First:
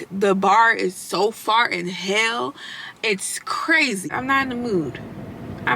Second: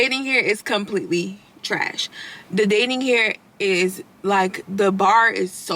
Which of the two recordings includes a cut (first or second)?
first